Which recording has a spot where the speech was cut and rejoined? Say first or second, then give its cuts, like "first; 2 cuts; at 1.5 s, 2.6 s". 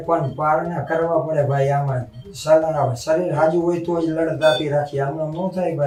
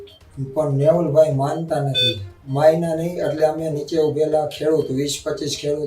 second; 1 cut; at 2.4 s